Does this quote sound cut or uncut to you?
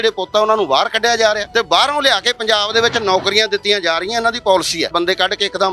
cut